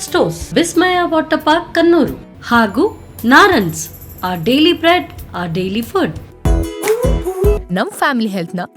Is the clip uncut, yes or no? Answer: no